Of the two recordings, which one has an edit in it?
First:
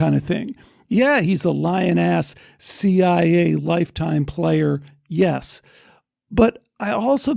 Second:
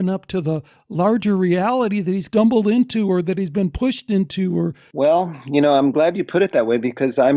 second; 2 cuts; at 2.2 s, 4.8 s

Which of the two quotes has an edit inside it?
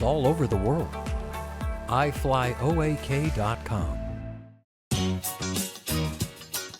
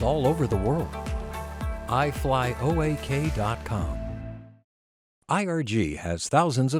first; 1 cut; at 4.7 s

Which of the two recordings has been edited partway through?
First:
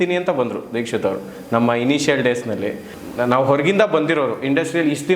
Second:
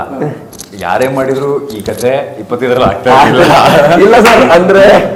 first; 1 cut; at 2.9 s

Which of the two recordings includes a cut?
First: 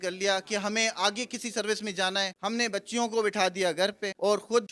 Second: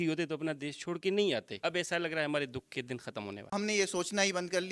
second; 2 cuts; at 1.5 s, 3.5 s

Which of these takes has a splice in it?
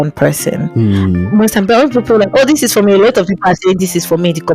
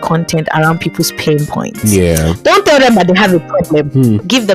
first; 2 cuts; at 1.0 s, 2.3 s

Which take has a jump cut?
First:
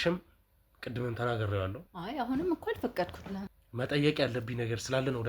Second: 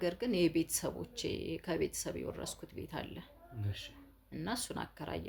first; 2 cuts; at 1.9 s, 3.6 s

